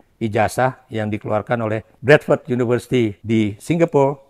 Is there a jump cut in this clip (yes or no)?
yes